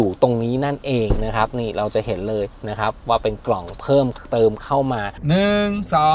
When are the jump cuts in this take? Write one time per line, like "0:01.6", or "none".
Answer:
0:05.1